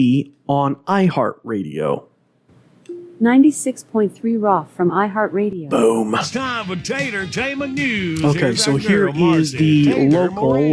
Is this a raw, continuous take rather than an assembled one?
yes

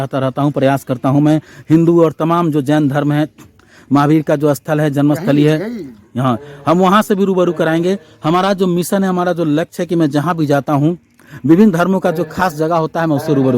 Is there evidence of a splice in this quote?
no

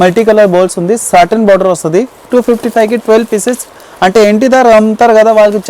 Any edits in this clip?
yes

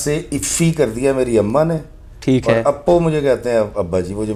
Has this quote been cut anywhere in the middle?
no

